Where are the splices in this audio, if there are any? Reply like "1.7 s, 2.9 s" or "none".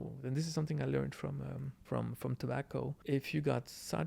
1.7 s, 3.0 s